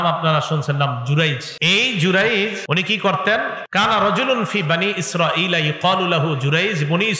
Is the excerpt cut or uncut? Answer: cut